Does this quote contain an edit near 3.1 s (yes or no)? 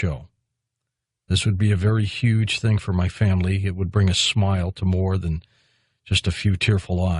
yes